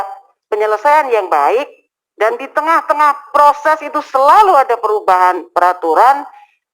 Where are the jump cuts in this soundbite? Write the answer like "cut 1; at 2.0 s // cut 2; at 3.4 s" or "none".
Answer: none